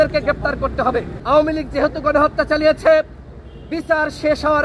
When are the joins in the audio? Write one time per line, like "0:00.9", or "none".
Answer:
0:01.1